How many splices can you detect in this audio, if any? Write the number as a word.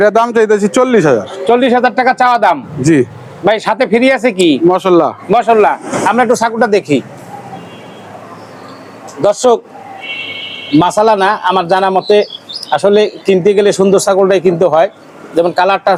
zero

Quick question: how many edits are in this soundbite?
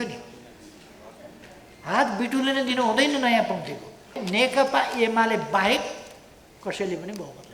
one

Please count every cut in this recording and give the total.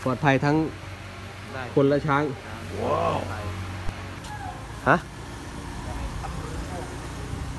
one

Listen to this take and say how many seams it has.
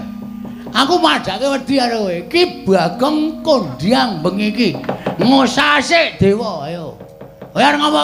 zero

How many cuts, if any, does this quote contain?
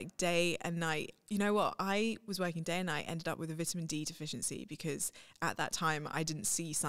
zero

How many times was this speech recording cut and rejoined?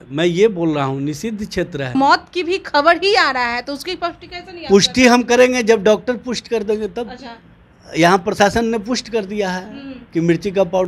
one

